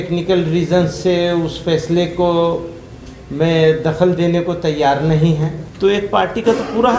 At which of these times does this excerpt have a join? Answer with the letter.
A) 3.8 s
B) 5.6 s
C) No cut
B